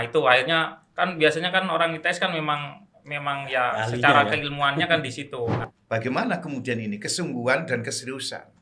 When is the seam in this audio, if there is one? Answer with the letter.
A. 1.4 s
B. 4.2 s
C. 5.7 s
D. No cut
C